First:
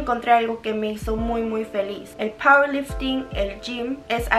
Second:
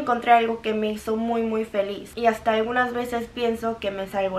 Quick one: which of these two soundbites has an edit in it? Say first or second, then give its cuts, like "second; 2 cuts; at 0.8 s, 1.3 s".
second; 1 cut; at 2.0 s